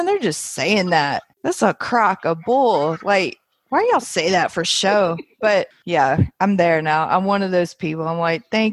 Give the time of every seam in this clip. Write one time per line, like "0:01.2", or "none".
0:01.3
0:05.8